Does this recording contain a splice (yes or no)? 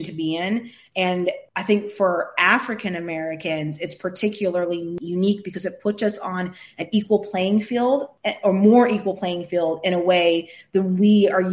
yes